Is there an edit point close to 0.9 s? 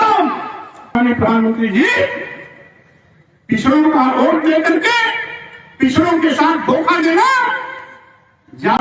yes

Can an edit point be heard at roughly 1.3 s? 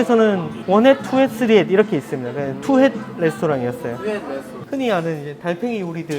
no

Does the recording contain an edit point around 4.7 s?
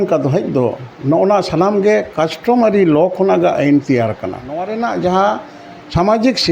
yes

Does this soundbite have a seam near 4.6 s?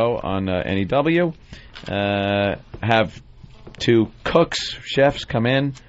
yes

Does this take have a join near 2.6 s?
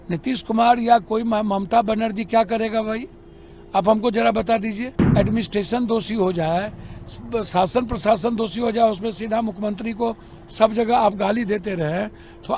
no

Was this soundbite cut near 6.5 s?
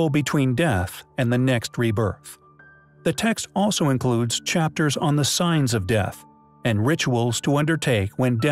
no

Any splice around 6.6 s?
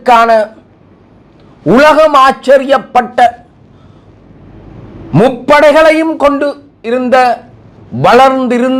no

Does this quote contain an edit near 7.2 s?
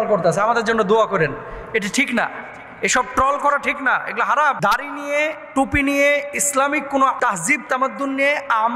yes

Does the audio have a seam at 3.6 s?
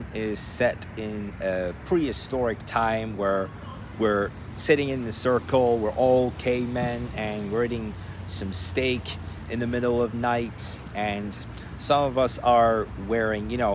no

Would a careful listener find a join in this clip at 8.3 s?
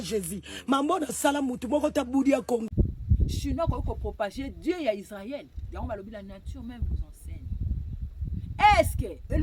no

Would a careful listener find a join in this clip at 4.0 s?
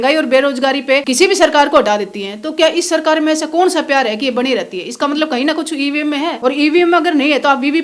no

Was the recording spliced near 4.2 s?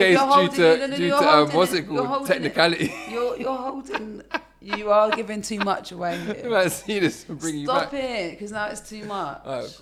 no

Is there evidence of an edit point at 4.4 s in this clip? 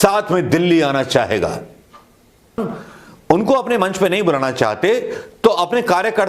no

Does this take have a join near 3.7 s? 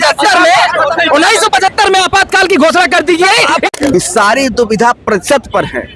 yes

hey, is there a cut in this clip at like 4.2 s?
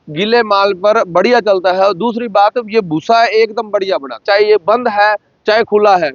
yes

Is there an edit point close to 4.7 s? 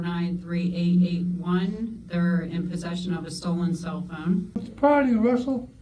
yes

